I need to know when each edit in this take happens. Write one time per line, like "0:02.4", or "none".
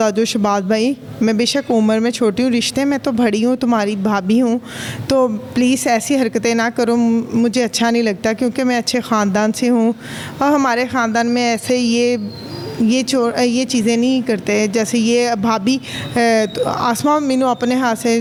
none